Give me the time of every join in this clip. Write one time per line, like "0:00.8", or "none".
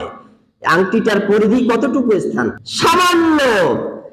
0:02.6

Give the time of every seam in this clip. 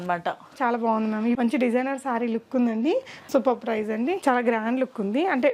0:01.4
0:03.1
0:04.2

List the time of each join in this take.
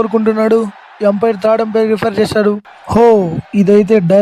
0:02.7

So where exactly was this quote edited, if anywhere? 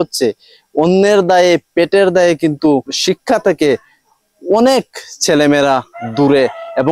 0:02.9

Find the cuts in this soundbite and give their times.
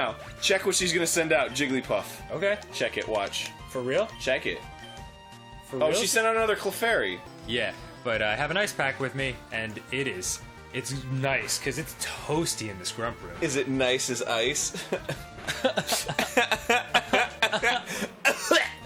0:10.4

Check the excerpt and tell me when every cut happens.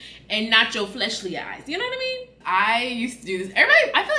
none

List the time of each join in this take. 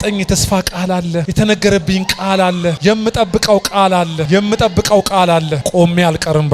none

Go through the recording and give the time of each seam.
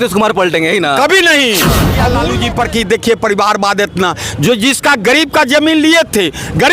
0:02.1

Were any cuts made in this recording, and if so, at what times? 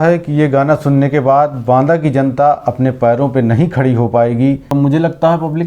0:04.7

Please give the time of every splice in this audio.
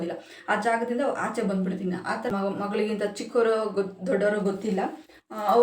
0:02.3

